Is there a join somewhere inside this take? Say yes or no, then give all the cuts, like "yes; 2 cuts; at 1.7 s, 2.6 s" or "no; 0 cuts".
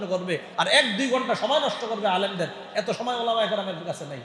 no; 0 cuts